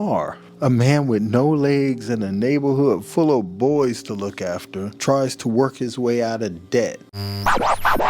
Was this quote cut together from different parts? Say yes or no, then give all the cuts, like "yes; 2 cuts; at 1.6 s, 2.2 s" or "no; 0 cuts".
yes; 1 cut; at 7.1 s